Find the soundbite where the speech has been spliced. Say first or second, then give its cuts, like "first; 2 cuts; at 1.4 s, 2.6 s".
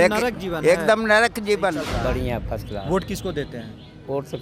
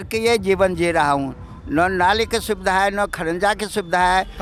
first; 1 cut; at 1.9 s